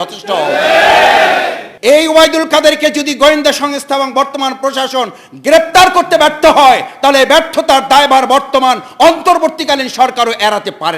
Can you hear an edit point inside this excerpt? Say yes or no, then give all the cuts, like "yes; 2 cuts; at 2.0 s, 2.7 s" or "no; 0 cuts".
yes; 1 cut; at 1.6 s